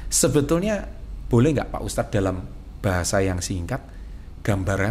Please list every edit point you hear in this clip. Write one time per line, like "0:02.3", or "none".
none